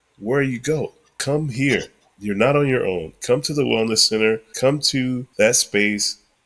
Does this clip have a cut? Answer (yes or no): yes